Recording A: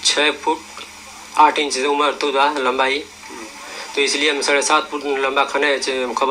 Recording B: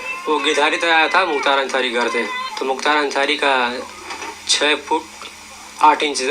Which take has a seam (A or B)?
B